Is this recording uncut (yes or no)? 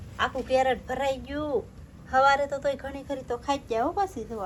yes